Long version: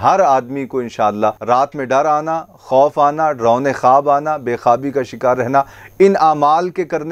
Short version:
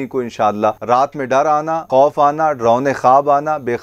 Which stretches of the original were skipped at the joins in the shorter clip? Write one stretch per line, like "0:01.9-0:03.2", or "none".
0:02.4-0:02.6